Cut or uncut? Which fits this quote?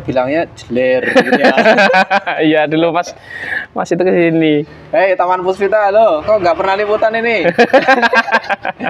uncut